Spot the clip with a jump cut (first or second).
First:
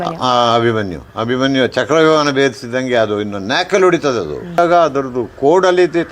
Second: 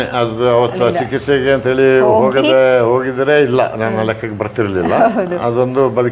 first